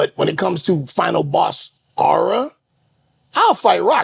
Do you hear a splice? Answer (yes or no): no